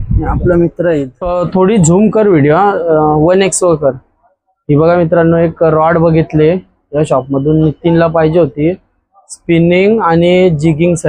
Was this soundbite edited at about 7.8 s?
no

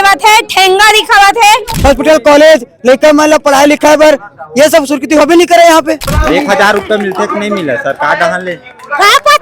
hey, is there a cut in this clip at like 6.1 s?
yes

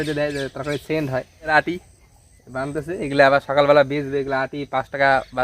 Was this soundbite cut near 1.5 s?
yes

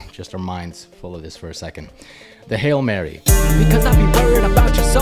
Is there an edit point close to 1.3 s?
no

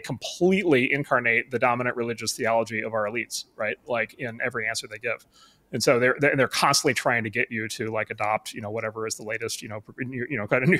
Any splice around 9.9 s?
no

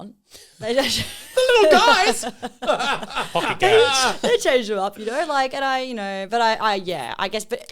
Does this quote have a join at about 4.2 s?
no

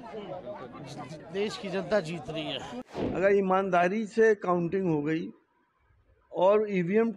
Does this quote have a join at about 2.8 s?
yes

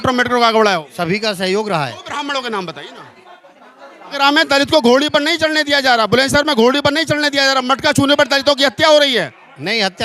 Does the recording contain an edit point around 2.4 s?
no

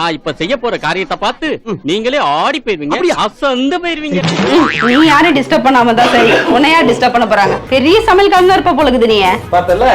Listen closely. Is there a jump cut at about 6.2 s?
no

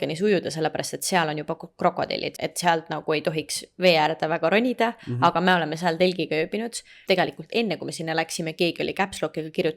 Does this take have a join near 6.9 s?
yes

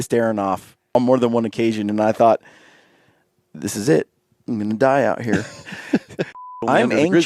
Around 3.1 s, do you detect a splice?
no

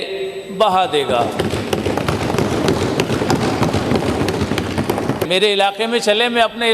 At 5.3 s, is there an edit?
yes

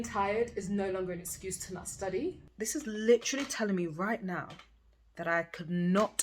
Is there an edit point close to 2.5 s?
yes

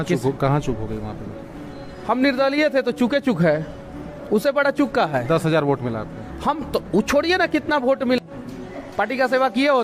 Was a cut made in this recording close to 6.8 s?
no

